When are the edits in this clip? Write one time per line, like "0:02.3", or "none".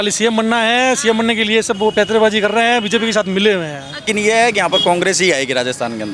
0:04.0